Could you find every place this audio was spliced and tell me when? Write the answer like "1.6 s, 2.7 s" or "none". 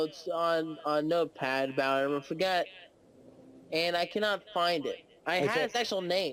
none